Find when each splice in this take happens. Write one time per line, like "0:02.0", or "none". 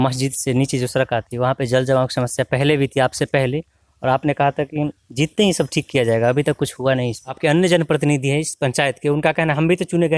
0:07.2